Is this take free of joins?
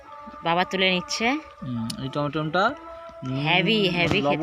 yes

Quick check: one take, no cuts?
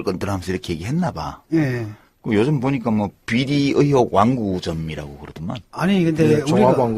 no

